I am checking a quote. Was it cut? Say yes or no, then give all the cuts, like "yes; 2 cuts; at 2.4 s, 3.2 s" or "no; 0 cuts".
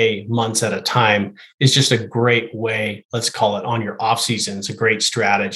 no; 0 cuts